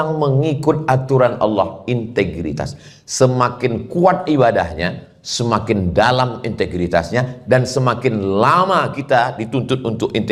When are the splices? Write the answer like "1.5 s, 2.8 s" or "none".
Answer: none